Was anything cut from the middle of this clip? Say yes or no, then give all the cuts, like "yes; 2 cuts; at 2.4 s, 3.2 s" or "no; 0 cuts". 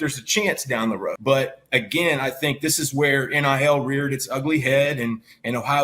yes; 1 cut; at 1.2 s